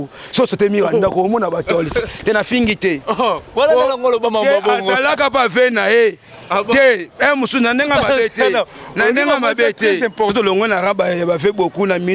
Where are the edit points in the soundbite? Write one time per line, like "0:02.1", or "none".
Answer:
0:10.3